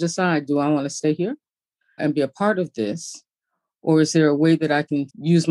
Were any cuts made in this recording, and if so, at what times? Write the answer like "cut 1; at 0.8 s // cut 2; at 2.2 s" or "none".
cut 1; at 2.0 s